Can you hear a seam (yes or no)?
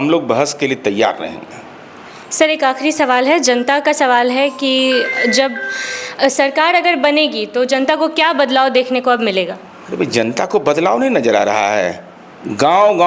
no